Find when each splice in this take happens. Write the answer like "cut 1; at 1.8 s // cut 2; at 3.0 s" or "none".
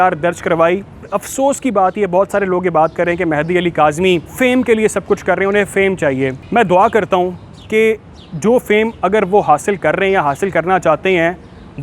cut 1; at 1.1 s // cut 2; at 4.3 s // cut 3; at 6.4 s